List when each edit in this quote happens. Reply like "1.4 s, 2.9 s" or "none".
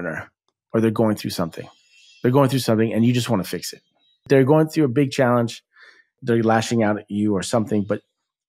4.2 s, 6.2 s